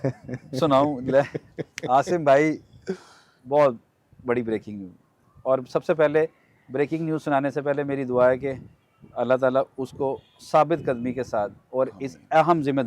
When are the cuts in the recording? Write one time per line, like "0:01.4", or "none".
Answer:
none